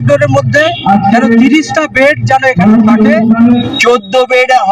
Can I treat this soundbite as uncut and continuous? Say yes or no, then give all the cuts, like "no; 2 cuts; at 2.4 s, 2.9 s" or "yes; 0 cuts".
no; 1 cut; at 3.7 s